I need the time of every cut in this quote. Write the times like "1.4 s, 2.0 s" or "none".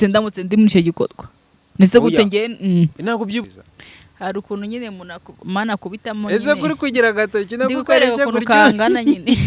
3.5 s